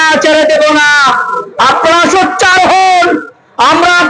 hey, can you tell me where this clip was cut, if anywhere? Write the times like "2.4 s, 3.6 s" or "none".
none

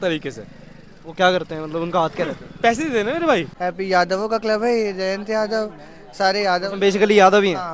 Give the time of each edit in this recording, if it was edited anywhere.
3.5 s

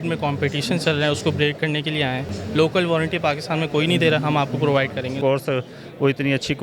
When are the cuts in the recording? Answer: 2.4 s, 5.1 s

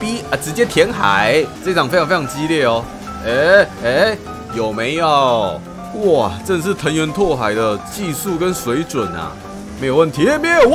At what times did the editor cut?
1.6 s

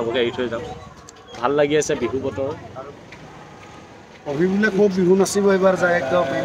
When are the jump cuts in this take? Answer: 2.6 s

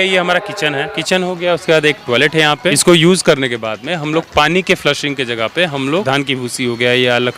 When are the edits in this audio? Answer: 0.9 s, 2.8 s, 6.0 s

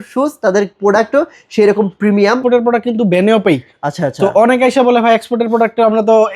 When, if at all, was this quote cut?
2.4 s

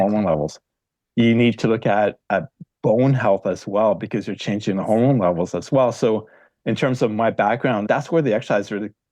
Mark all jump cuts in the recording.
7.8 s

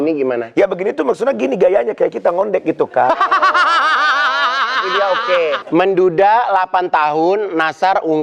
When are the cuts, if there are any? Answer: 5.6 s

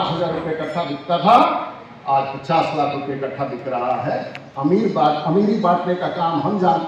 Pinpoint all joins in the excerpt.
none

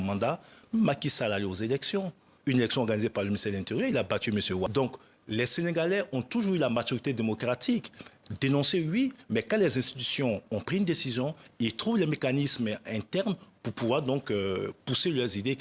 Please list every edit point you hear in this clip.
4.7 s

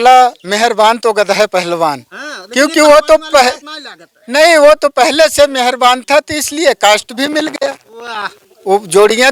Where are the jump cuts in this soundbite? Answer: none

